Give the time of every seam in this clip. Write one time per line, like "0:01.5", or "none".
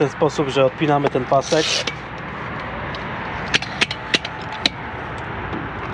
none